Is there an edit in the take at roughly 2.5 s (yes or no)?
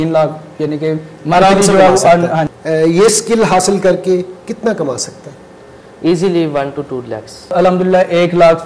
yes